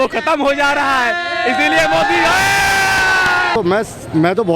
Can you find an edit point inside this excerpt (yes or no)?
yes